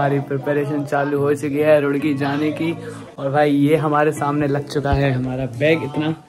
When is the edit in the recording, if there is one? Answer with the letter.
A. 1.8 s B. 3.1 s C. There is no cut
C